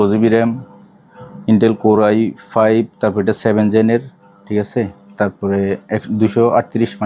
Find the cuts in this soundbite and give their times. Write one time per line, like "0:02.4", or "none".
none

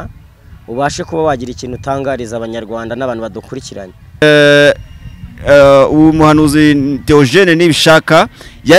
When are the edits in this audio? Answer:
0:04.2

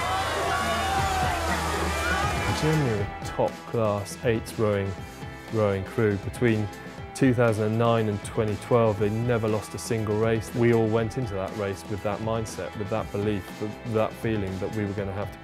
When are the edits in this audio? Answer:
0:01.0

